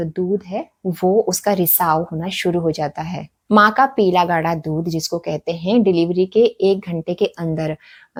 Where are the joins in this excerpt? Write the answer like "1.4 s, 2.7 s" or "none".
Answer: none

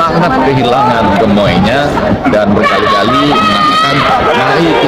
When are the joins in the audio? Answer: 2.2 s

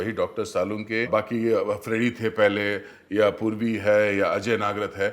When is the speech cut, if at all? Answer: 1.1 s

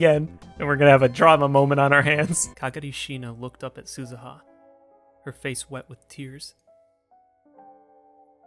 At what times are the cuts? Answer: 2.5 s

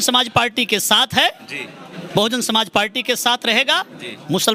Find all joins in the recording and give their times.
none

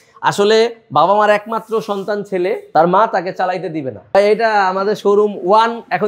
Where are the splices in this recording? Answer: 2.7 s, 4.1 s

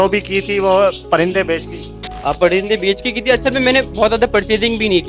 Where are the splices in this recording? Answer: none

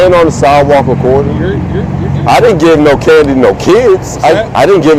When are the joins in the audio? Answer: none

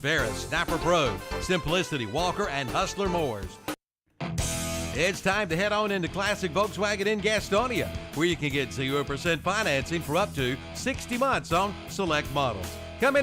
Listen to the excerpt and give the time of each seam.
3.9 s

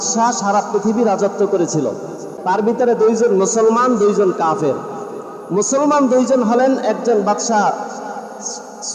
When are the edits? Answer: 2.2 s

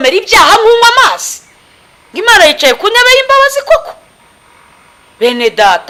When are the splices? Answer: none

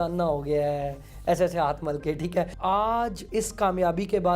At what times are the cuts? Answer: 2.5 s, 3.2 s

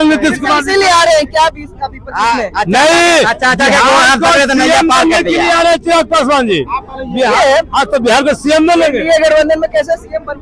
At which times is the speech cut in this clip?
none

